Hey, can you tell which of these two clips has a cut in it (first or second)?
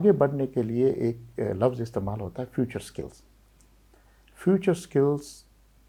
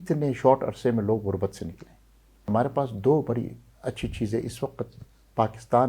second